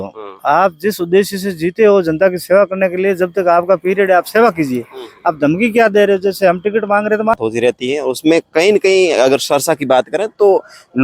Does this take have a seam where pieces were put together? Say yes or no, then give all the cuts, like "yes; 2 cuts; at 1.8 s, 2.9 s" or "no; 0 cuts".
yes; 1 cut; at 7.4 s